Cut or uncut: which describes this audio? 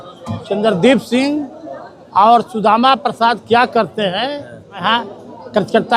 cut